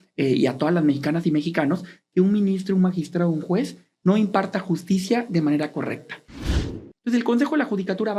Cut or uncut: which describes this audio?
cut